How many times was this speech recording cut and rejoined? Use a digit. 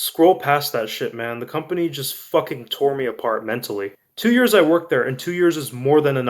1